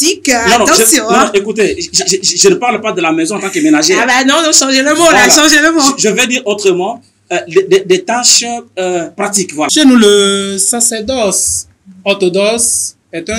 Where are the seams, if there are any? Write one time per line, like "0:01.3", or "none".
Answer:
0:09.7